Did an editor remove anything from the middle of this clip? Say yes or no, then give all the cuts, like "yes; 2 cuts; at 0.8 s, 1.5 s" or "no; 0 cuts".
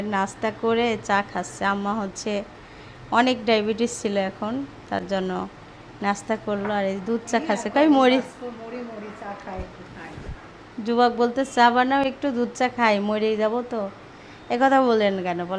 no; 0 cuts